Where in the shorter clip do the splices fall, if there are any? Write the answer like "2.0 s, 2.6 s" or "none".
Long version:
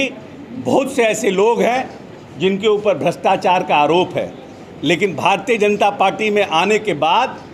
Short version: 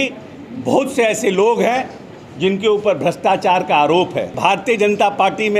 4.4 s